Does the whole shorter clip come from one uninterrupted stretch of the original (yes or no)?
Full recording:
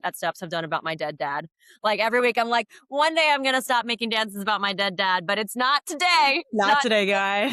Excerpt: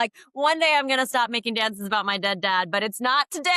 yes